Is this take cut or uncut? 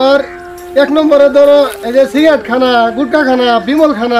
uncut